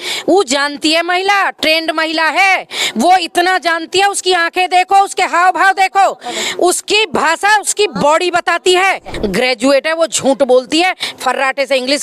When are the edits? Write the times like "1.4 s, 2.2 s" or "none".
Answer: 9.1 s

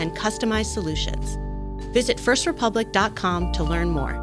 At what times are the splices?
none

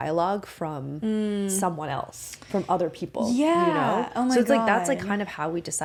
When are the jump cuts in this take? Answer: none

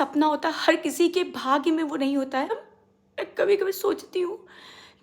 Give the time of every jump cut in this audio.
2.7 s

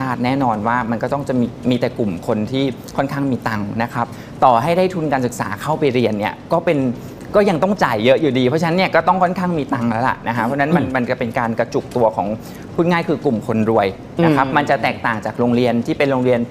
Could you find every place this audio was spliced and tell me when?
none

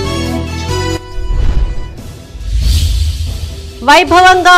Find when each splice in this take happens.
none

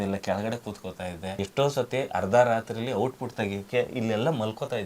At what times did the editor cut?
1.4 s

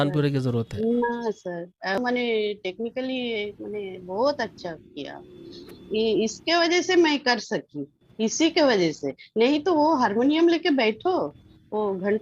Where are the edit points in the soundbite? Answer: 2.0 s

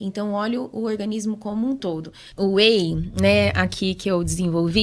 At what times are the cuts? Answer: 2.2 s

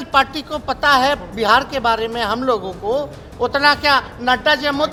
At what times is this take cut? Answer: none

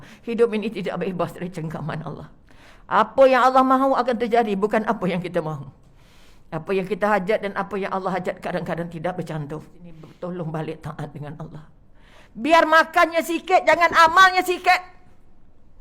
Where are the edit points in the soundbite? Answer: 10.0 s

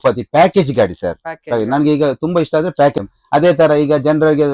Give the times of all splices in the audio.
3.0 s

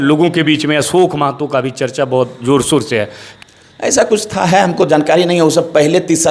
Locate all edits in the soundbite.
3.2 s

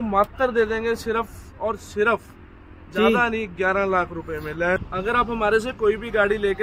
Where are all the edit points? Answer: 4.8 s

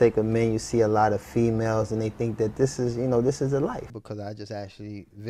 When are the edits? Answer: 3.9 s

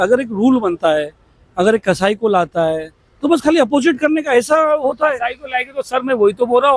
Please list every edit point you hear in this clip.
none

